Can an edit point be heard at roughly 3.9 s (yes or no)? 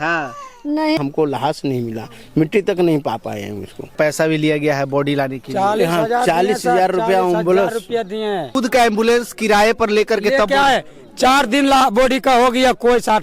yes